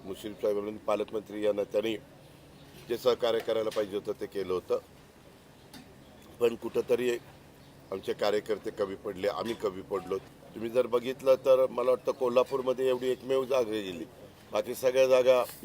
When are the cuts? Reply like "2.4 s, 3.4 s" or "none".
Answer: 10.3 s